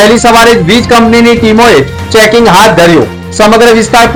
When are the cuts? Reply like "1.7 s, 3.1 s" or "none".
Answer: none

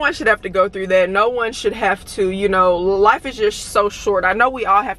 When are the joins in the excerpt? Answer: none

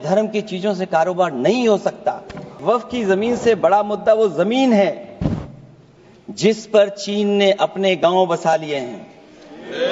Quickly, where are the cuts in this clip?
2.6 s

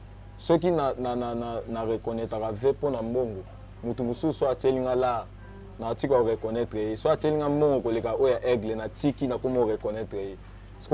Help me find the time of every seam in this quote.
none

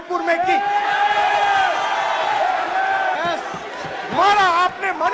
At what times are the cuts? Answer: 3.1 s

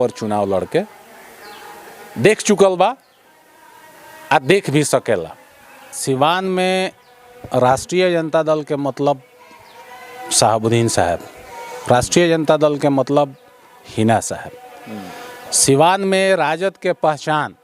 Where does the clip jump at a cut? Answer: 6.0 s

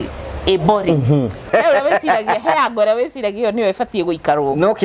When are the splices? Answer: 1.5 s

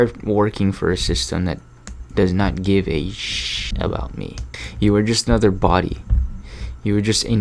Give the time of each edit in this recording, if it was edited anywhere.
none

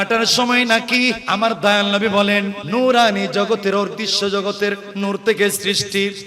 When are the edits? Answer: 1.2 s, 2.6 s, 4.9 s

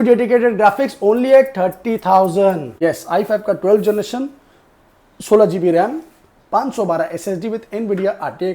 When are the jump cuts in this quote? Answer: 2.7 s

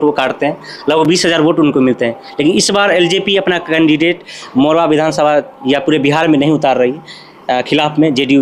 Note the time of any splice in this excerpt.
none

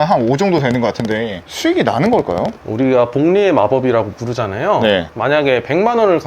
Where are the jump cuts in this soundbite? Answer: 1.4 s, 2.6 s

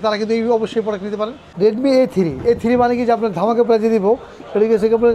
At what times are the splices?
1.6 s

